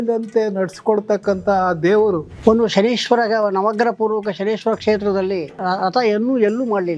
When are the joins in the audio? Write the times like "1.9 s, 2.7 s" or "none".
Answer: 2.3 s